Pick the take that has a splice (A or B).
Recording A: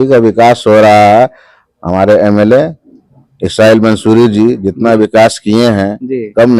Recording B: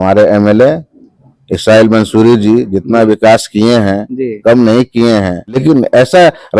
B